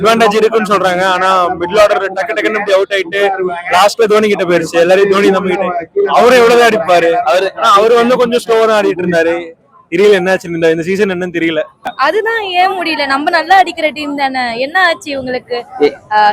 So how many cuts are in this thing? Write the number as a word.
one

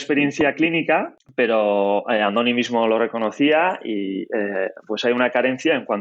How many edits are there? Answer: one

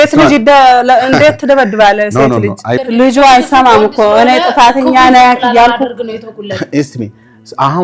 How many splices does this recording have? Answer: one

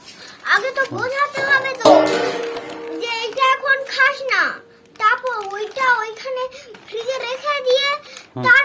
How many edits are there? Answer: one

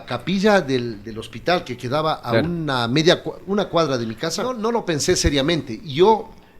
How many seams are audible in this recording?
one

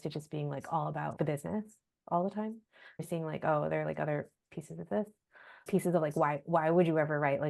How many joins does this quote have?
three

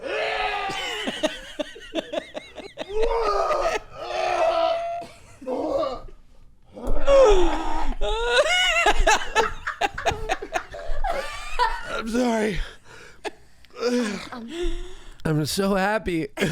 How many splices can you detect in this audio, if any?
two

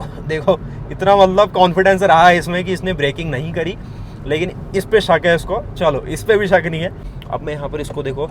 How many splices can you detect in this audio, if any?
one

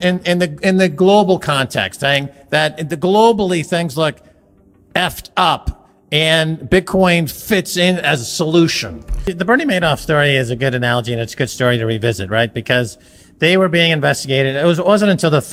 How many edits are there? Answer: zero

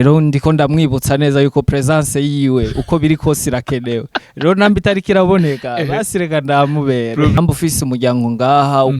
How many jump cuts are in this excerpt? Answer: one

